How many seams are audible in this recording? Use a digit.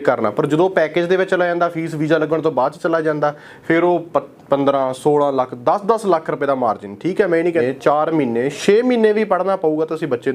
1